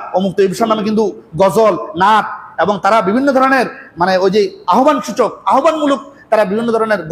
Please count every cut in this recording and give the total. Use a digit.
0